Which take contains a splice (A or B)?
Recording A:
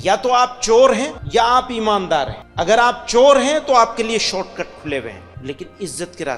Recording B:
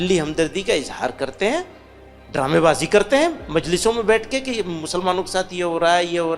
A